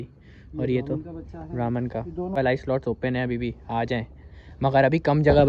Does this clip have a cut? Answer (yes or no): yes